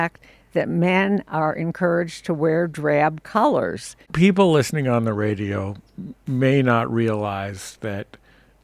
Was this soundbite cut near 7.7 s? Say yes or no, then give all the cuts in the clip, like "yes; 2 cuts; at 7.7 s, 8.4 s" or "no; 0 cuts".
no; 1 cut; at 4.0 s